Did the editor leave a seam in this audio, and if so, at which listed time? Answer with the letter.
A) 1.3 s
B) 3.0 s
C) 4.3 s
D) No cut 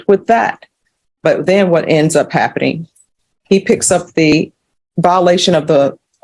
C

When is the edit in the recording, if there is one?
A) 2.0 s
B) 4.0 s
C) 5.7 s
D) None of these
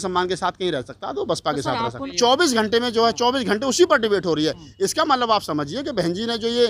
A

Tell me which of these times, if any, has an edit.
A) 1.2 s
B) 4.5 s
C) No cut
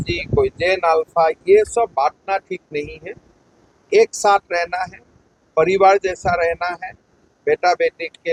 C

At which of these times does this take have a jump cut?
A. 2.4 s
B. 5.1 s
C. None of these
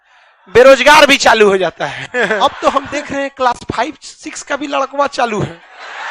A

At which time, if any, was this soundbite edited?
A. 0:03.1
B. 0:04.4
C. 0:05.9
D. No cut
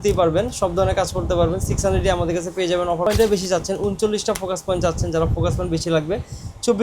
A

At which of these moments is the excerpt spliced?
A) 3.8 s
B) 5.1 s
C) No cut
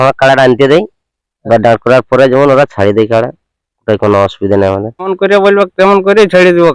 B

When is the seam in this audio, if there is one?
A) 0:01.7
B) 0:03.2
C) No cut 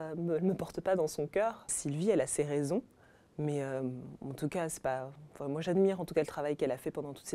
C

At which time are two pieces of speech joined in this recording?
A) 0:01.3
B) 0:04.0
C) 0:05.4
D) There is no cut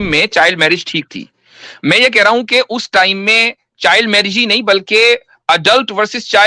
D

